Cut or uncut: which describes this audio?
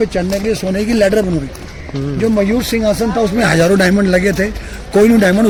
uncut